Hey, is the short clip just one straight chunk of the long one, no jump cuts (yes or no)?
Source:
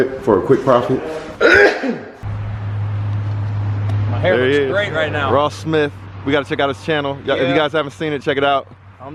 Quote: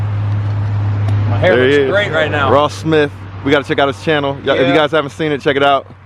yes